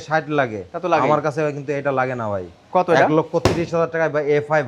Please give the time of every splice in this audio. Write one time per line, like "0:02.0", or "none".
none